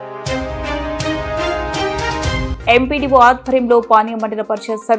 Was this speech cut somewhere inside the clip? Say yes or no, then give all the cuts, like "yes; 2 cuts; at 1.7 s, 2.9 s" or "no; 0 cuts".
yes; 1 cut; at 2.5 s